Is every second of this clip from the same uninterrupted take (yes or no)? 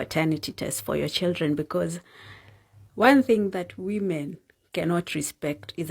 yes